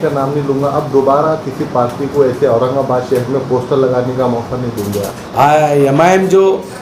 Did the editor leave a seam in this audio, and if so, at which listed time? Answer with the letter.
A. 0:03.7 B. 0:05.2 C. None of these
B